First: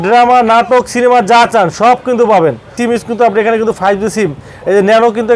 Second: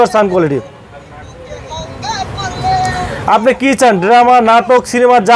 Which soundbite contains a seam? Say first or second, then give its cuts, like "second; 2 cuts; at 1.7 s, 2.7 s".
first; 1 cut; at 2.7 s